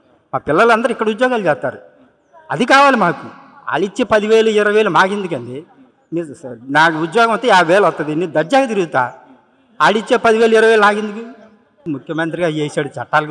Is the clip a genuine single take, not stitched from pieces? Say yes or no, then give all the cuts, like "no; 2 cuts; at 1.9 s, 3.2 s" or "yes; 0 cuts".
no; 1 cut; at 11.9 s